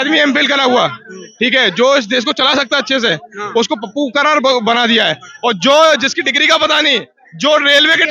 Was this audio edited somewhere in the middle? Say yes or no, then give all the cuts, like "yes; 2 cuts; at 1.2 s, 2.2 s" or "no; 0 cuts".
no; 0 cuts